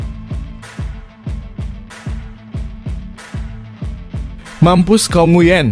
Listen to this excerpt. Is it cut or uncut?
uncut